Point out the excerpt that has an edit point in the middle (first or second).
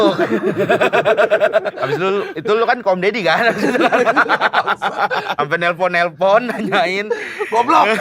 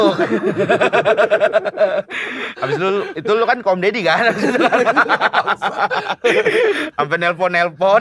first